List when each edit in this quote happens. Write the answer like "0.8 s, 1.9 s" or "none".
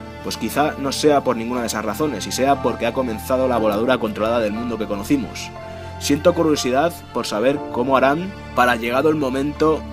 none